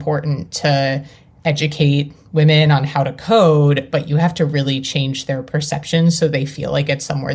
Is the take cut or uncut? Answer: uncut